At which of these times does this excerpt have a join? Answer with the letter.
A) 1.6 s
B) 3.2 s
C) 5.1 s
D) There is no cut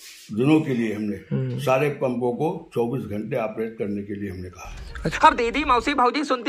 D